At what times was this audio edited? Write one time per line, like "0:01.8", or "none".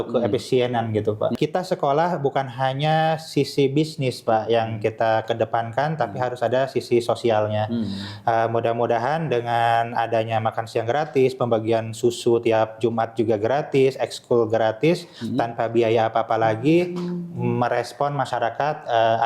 0:01.3